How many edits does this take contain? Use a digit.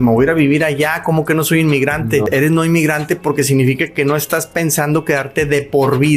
1